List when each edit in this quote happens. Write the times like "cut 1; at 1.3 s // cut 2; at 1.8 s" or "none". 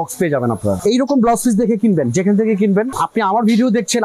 cut 1; at 0.8 s // cut 2; at 3.0 s